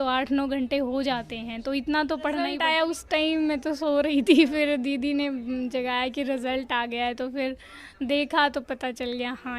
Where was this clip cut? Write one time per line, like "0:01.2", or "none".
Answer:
0:02.6